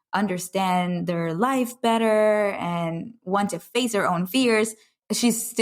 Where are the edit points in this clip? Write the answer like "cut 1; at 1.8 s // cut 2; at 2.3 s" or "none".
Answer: none